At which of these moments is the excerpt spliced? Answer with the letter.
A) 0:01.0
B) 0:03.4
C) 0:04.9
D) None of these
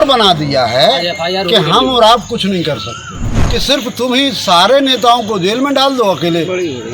B